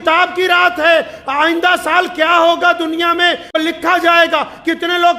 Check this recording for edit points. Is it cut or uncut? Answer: cut